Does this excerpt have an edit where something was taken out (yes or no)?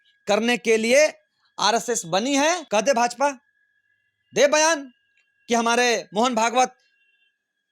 yes